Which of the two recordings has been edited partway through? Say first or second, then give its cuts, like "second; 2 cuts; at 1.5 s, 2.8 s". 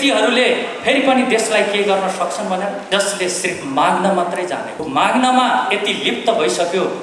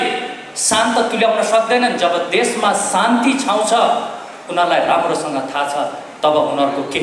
first; 2 cuts; at 2.8 s, 4.7 s